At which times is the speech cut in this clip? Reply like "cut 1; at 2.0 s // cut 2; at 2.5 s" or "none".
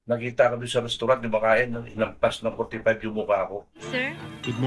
cut 1; at 3.8 s